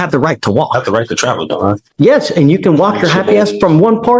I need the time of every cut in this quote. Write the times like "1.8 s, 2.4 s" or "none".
1.8 s